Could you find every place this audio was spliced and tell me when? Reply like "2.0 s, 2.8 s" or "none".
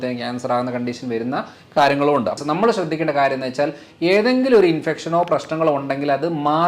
2.4 s